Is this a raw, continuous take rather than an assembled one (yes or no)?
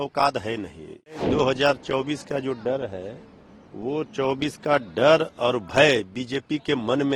no